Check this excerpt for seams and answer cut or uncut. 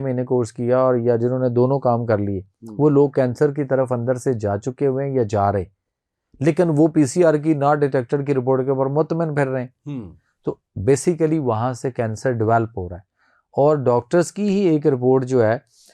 uncut